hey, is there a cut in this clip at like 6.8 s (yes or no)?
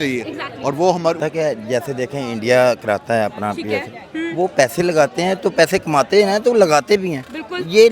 no